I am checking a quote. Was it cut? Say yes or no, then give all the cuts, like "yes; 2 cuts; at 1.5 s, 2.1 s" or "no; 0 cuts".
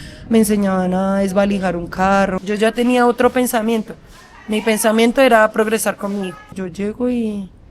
yes; 2 cuts; at 2.4 s, 6.6 s